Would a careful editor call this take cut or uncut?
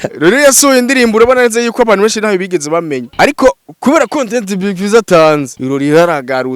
cut